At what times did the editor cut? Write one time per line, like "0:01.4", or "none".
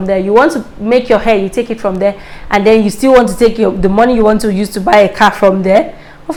none